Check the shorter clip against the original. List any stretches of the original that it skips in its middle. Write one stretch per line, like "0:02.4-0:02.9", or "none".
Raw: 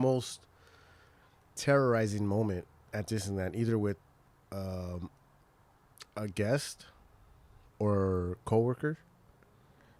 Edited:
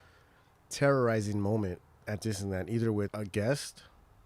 0:04.0-0:06.1